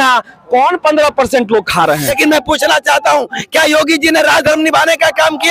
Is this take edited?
yes; 1 cut; at 2.1 s

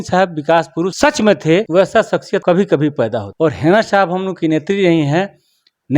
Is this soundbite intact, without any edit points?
no; 3 cuts; at 0.9 s, 1.8 s, 3.3 s

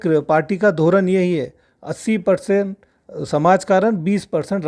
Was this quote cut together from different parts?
no; 0 cuts

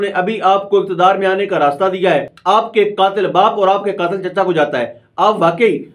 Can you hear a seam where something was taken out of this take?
yes; 1 cut; at 2.3 s

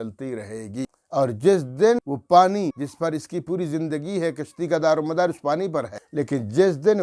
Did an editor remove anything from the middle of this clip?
yes; 4 cuts; at 1.0 s, 2.0 s, 2.8 s, 6.0 s

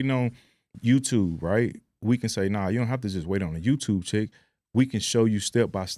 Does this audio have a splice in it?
no; 0 cuts

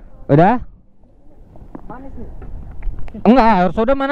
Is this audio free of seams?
yes; 0 cuts

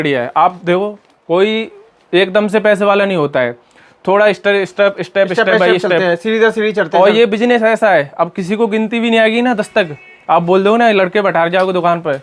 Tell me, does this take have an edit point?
no; 0 cuts

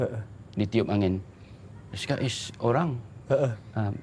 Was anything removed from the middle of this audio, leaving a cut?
no; 0 cuts

